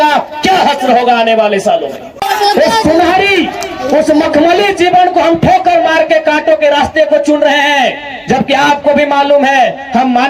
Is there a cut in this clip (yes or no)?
yes